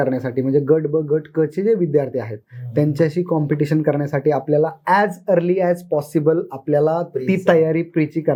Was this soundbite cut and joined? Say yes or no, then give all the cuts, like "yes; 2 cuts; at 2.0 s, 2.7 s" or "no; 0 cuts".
no; 0 cuts